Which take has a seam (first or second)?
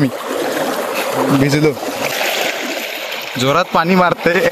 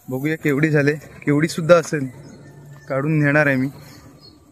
first